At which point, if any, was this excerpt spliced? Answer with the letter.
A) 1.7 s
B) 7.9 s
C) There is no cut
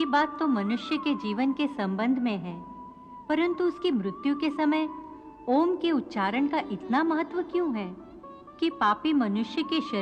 C